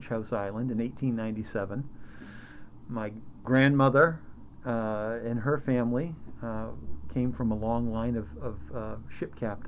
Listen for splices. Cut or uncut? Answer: cut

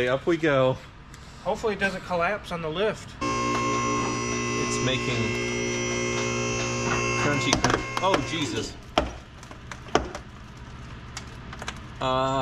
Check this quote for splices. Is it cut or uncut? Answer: cut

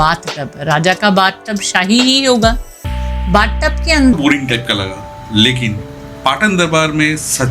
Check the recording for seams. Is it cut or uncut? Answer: cut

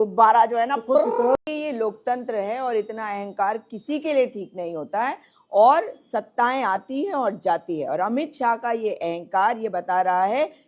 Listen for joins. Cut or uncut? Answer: cut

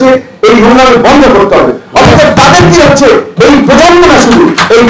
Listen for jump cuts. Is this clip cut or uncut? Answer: uncut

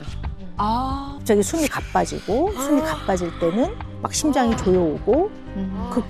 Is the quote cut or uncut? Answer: cut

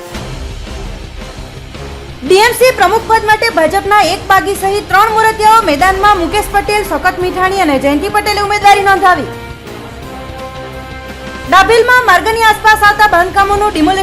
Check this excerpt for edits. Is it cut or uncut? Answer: cut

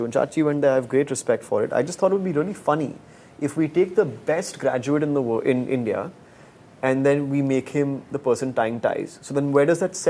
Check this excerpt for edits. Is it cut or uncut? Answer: uncut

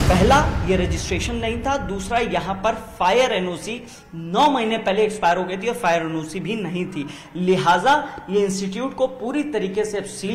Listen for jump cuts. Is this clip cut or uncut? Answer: uncut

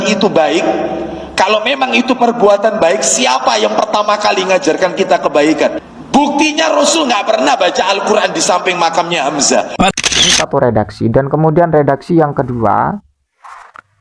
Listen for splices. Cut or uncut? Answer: cut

